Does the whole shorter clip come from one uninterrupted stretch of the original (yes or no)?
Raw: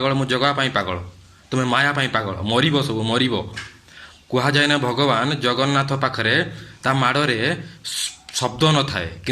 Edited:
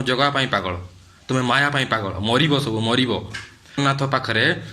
no